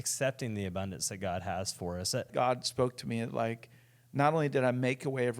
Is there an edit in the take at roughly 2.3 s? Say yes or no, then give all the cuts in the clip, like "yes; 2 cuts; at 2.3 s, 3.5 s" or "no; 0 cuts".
yes; 1 cut; at 2.3 s